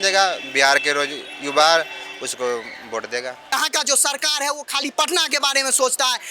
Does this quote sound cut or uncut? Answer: cut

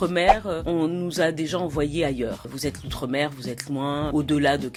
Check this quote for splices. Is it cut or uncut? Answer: uncut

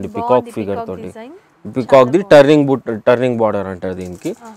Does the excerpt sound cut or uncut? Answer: uncut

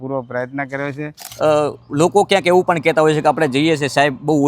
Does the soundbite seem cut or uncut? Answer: cut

